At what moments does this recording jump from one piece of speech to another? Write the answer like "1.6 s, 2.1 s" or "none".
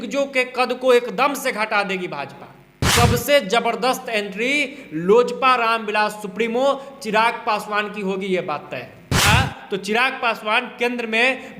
2.9 s, 9.2 s